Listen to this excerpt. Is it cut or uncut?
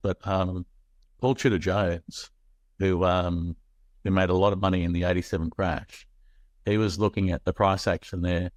uncut